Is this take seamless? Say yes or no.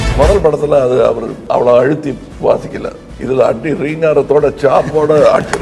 no